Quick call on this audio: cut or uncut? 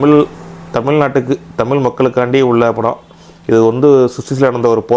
uncut